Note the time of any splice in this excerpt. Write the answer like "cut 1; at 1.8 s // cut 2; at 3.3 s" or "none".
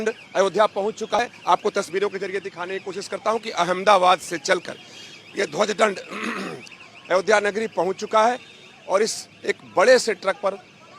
cut 1; at 1.2 s